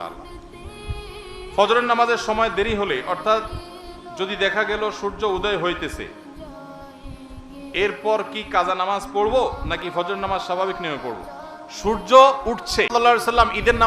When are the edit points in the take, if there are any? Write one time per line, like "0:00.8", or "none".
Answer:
0:12.9

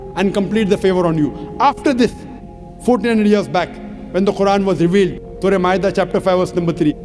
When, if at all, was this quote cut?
none

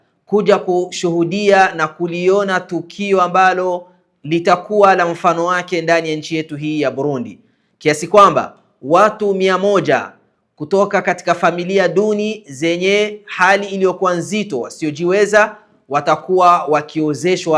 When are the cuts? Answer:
none

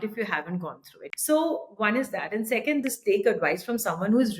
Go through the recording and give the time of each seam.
0:00.9
0:02.8

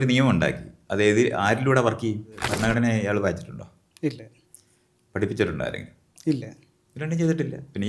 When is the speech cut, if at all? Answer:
0:02.5

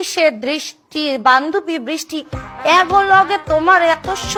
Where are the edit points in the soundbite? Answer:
none

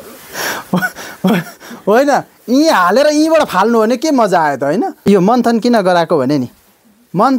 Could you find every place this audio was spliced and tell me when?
0:05.0

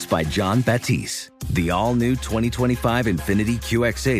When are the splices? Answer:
none

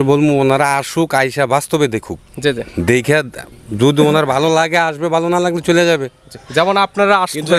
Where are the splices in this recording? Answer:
none

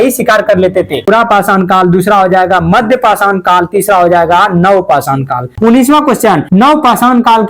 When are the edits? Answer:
0:01.0
0:05.5
0:06.4

